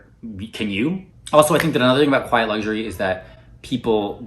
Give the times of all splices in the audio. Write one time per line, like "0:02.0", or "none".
0:01.1